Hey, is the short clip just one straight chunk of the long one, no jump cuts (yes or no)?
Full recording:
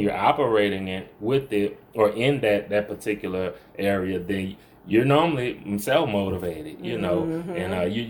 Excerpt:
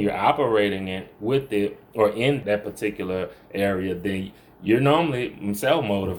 no